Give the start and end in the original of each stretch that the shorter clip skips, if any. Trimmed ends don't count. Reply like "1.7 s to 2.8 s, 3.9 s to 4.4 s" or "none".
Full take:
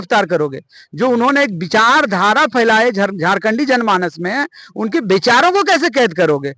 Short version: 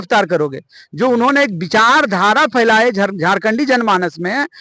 none